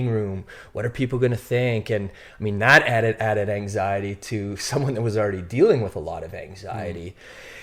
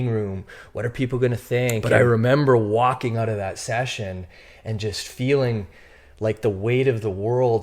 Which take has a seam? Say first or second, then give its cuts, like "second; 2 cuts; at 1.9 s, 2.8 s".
second; 1 cut; at 1.8 s